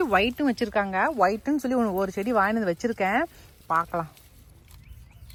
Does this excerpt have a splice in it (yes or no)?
no